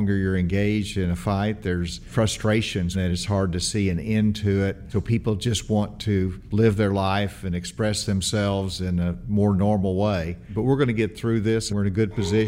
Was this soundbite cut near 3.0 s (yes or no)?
yes